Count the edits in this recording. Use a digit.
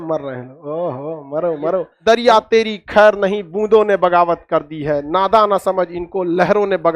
1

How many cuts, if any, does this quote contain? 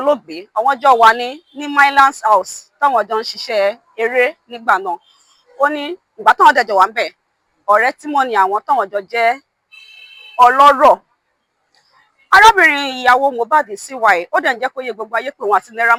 0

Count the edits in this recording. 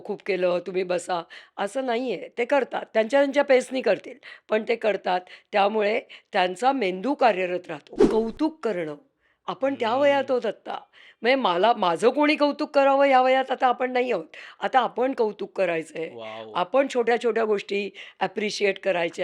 1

